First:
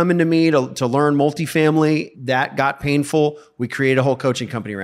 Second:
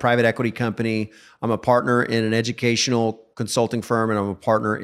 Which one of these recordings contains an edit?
first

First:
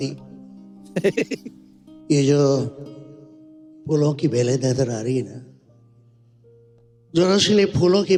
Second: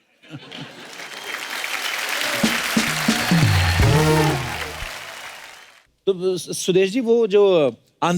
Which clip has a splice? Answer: second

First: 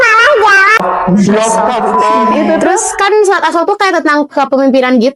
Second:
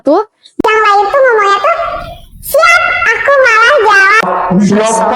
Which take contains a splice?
first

